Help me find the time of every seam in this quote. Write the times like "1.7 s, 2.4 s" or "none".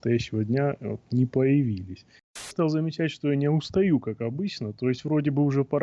2.5 s